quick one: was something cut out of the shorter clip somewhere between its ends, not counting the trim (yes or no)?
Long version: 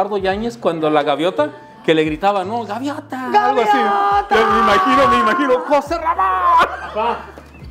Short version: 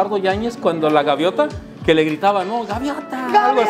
no